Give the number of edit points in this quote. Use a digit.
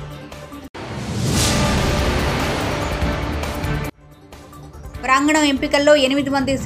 0